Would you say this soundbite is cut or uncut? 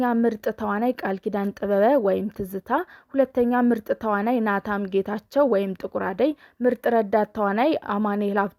uncut